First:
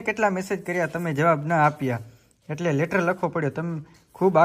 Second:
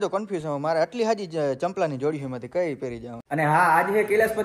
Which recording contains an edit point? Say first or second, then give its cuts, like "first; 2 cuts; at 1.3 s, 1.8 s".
second; 1 cut; at 3.2 s